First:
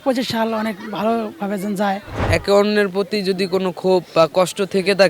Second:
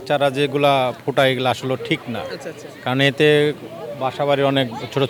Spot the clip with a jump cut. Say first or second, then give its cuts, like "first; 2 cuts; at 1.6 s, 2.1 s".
first; 1 cut; at 2.2 s